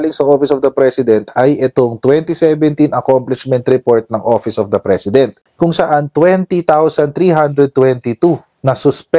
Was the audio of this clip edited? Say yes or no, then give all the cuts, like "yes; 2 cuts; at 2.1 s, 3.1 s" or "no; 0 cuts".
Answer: no; 0 cuts